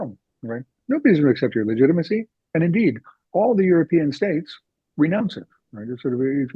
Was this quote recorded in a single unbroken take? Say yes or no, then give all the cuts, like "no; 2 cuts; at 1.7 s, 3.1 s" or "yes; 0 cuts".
yes; 0 cuts